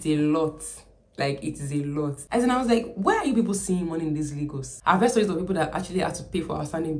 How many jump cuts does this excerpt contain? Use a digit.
2